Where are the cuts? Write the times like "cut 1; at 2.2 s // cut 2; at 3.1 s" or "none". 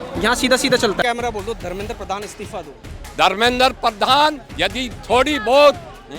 cut 1; at 1.0 s